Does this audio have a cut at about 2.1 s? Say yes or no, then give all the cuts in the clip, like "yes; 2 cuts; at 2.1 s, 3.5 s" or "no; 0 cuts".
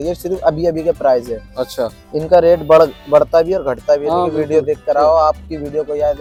no; 0 cuts